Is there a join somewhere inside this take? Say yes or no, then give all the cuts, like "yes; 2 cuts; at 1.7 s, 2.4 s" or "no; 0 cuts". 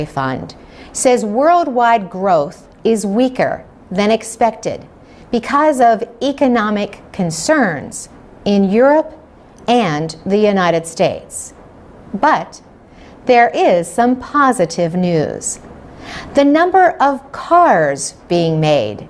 no; 0 cuts